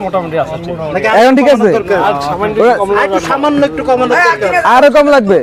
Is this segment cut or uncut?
uncut